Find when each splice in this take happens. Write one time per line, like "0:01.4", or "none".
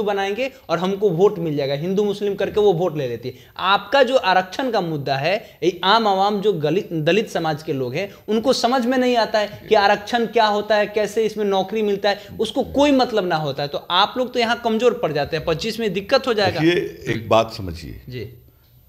none